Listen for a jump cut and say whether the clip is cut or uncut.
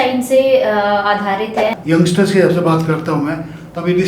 cut